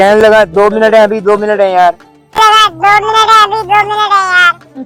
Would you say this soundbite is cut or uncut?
uncut